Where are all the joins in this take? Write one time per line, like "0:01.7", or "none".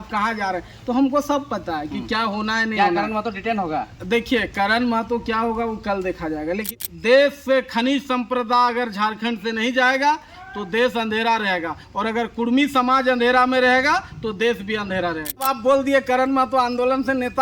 0:06.6
0:15.4